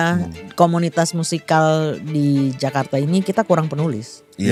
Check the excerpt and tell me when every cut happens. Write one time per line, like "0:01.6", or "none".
none